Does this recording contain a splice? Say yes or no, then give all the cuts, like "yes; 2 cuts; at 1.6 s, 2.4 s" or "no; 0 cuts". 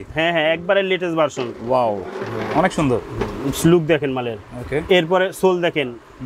no; 0 cuts